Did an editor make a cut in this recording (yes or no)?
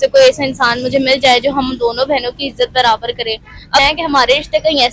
yes